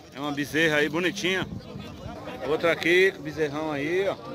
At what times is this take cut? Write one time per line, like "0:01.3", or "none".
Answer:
0:02.1